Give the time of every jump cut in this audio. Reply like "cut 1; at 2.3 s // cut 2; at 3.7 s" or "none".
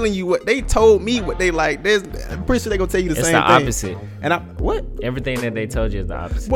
none